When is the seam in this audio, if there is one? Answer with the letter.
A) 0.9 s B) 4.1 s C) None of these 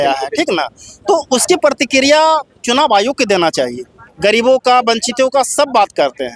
B